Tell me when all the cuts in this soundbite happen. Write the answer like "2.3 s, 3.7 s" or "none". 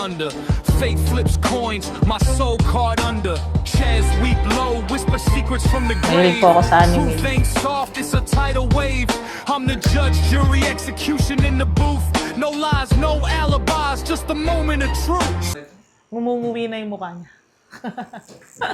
16.0 s

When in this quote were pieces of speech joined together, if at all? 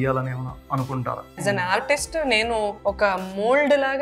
1.4 s, 2.8 s

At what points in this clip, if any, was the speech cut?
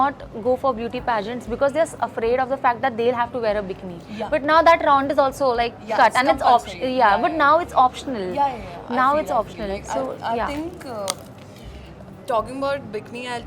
none

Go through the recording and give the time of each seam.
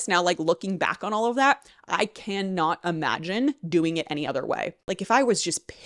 4.8 s

